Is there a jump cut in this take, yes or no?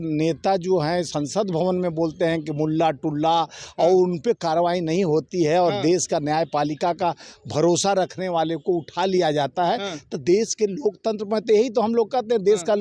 no